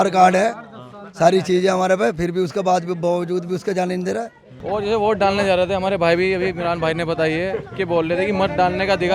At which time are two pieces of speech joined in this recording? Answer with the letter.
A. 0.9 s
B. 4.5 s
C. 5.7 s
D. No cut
B